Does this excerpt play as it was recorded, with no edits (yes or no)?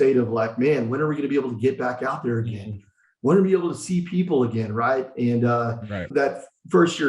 no